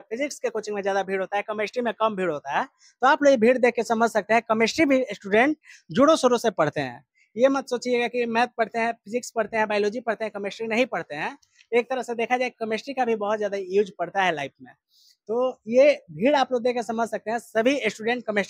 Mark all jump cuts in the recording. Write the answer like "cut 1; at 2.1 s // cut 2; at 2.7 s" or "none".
none